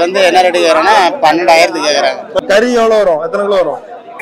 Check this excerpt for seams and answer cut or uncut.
cut